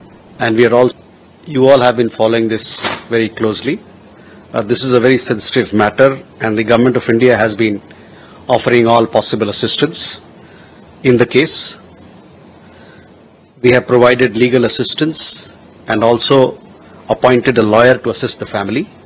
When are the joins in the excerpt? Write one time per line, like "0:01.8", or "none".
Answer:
0:00.9